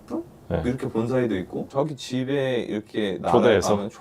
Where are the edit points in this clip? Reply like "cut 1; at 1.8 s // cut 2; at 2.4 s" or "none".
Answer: cut 1; at 1.7 s